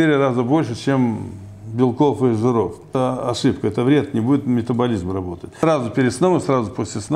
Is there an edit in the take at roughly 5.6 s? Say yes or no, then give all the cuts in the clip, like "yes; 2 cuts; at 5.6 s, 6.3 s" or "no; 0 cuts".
yes; 2 cuts; at 2.9 s, 5.6 s